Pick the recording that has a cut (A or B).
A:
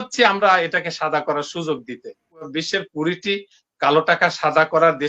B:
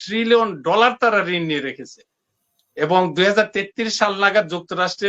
A